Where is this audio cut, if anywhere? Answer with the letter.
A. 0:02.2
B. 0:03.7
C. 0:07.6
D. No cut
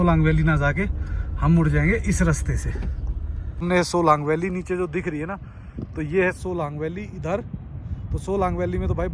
B